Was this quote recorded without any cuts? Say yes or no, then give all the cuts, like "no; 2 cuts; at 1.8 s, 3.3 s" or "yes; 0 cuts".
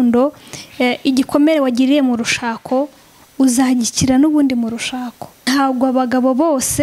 no; 1 cut; at 5.4 s